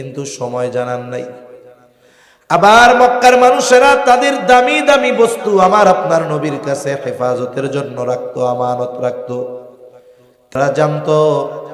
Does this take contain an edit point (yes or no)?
yes